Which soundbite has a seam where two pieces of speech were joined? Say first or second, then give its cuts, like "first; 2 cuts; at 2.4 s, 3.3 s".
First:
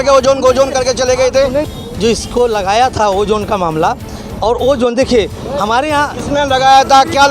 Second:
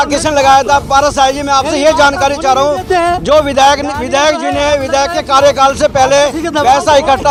first; 1 cut; at 1.7 s